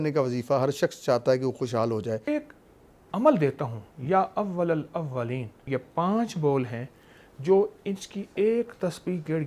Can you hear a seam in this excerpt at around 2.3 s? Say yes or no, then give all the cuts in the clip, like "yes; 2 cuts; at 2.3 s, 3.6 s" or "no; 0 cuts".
yes; 2 cuts; at 2.3 s, 5.6 s